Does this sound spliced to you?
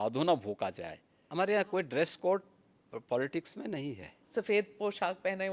yes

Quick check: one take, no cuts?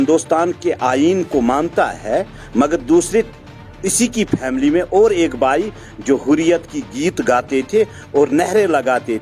no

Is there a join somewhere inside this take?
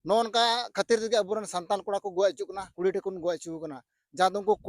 yes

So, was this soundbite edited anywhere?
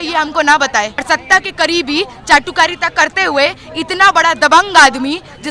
yes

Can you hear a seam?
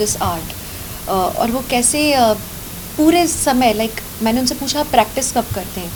no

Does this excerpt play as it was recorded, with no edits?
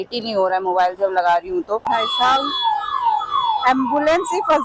no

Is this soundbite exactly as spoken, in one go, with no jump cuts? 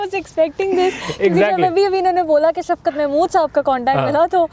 yes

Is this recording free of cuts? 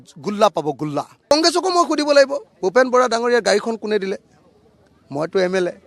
no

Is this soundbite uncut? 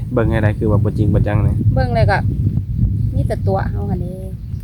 yes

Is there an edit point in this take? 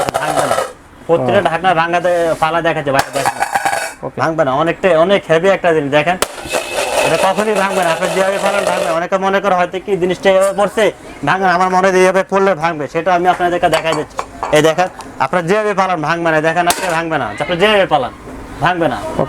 no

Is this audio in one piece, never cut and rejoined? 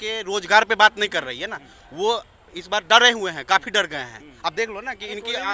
yes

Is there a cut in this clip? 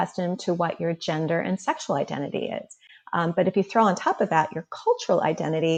no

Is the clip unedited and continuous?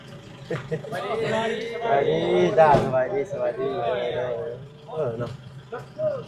yes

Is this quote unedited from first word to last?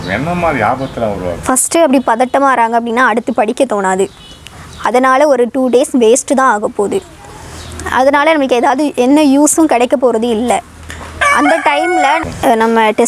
no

